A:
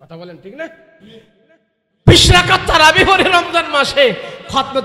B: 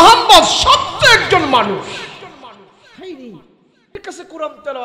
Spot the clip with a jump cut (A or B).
B